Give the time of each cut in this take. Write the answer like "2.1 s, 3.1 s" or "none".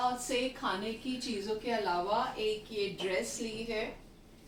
none